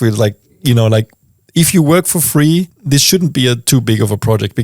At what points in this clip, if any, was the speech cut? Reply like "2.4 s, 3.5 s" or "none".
2.8 s